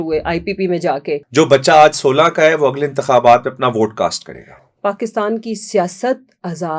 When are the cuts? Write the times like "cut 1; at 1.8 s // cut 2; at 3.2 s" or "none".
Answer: cut 1; at 1.3 s // cut 2; at 4.7 s